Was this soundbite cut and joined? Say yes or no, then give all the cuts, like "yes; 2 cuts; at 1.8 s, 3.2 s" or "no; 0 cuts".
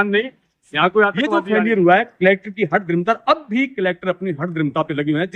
yes; 1 cut; at 1.3 s